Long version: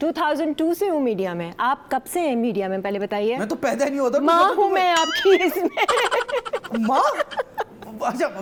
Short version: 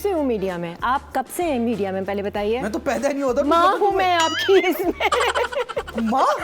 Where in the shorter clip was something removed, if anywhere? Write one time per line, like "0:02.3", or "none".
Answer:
none